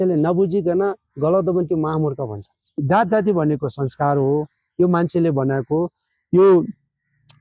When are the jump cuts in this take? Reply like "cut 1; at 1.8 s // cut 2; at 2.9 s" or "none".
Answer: cut 1; at 2.8 s